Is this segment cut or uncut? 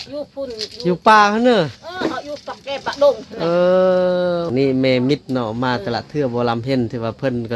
cut